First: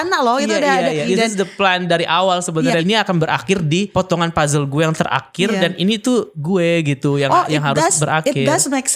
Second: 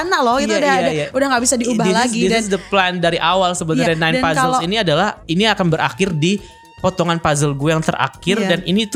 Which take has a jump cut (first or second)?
first